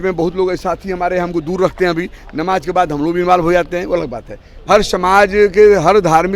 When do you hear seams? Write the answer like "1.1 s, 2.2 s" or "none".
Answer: 4.5 s